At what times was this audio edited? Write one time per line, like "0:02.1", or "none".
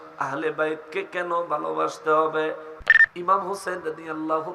0:02.7